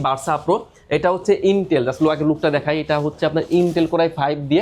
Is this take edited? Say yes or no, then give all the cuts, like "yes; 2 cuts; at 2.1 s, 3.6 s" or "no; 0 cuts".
no; 0 cuts